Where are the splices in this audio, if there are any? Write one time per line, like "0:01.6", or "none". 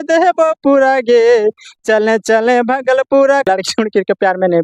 0:03.5